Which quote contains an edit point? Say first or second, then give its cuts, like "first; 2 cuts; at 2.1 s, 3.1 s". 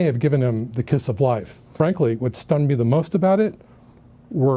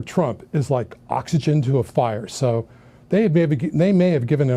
first; 1 cut; at 1.6 s